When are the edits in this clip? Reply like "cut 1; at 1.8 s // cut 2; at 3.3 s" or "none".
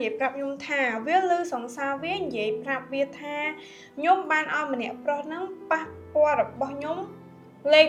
none